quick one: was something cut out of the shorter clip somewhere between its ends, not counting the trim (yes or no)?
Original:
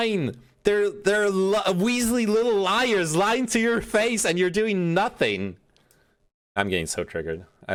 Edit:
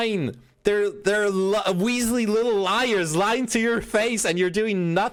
no